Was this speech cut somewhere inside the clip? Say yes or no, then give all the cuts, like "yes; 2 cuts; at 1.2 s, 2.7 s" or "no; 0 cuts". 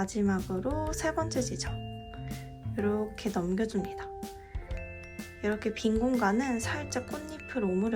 no; 0 cuts